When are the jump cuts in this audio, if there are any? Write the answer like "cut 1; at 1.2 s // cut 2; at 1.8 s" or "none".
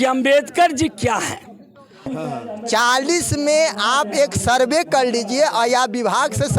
cut 1; at 2.1 s

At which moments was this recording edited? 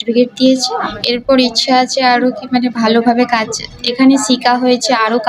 cut 1; at 1.0 s

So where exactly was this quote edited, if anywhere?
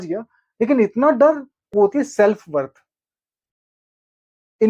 cut 1; at 1.5 s

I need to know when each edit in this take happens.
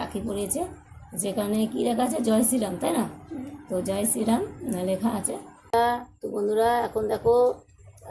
cut 1; at 5.5 s

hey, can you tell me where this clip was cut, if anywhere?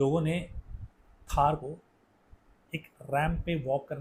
none

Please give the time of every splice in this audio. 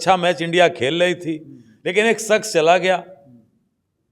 none

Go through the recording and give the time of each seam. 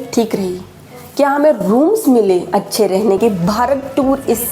cut 1; at 3.2 s

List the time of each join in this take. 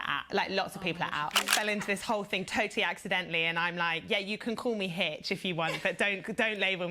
cut 1; at 1.5 s

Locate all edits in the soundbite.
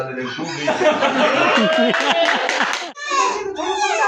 cut 1; at 2.9 s

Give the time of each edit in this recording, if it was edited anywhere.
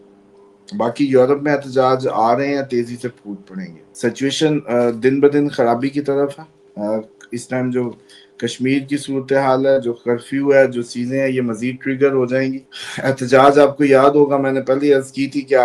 cut 1; at 3.8 s

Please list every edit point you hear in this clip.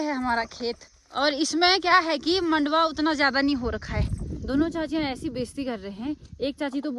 cut 1; at 0.9 s // cut 2; at 4.3 s

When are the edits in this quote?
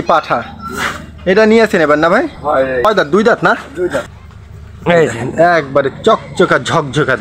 cut 1; at 2.8 s // cut 2; at 4.1 s

